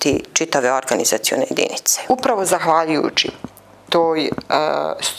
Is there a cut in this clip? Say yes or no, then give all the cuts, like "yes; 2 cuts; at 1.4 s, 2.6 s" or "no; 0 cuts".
yes; 1 cut; at 2.0 s